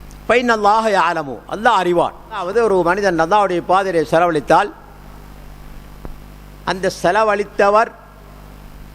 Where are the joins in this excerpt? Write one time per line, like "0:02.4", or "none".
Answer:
0:02.5

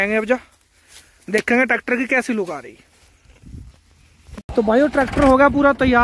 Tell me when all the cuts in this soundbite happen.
0:04.4

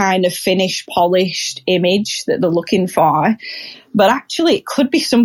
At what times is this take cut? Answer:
none

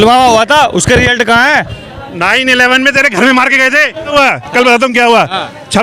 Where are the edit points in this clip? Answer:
0:04.1

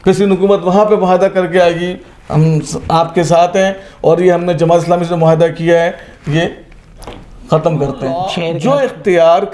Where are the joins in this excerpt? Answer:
0:08.4

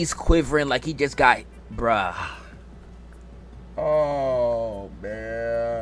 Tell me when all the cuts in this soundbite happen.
none

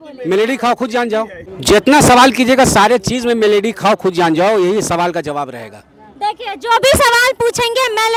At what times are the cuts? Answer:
none

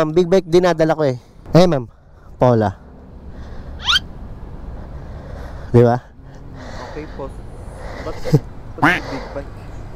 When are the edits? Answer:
0:01.3

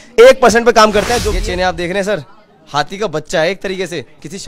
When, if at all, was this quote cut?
0:01.2

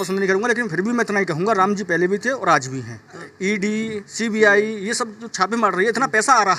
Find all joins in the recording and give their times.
0:03.2

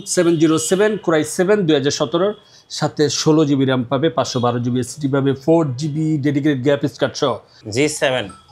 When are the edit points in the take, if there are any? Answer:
0:07.6

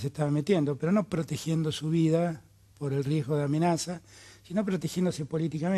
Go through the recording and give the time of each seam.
none

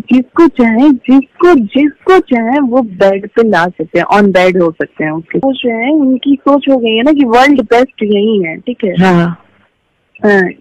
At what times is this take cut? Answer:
0:05.4

